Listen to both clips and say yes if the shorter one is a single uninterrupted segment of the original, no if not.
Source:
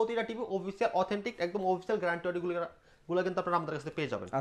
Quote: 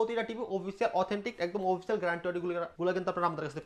no